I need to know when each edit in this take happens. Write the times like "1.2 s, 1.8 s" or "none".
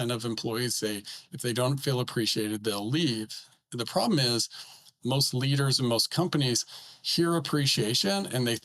4.9 s